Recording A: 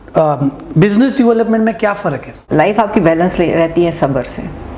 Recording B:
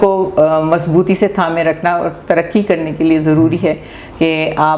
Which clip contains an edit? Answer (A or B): A